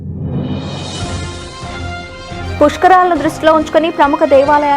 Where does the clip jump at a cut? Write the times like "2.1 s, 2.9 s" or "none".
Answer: 2.0 s